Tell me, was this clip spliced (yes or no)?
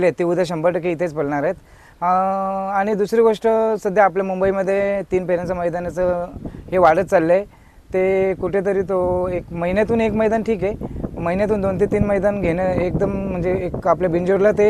no